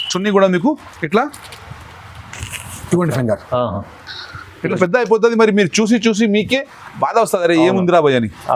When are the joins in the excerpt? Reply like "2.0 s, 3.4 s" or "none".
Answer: 4.8 s